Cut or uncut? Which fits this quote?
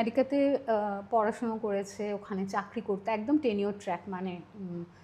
uncut